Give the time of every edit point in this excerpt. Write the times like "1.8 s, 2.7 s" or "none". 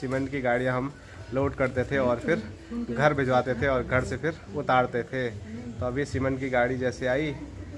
none